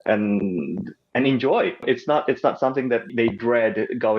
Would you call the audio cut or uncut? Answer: cut